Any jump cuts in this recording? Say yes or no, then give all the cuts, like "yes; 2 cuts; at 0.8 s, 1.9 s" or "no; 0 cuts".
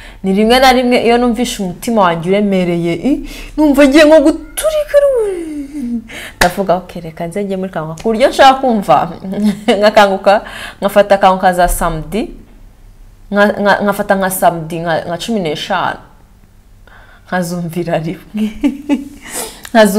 no; 0 cuts